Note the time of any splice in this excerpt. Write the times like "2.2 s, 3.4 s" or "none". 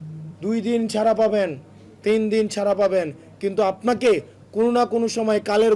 none